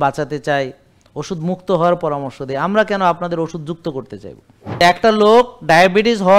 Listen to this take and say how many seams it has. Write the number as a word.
one